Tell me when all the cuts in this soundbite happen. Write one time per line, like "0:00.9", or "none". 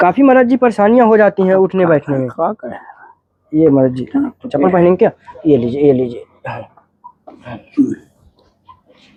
none